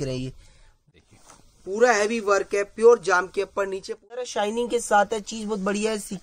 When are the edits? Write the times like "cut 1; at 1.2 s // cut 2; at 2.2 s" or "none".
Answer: cut 1; at 0.9 s // cut 2; at 4.3 s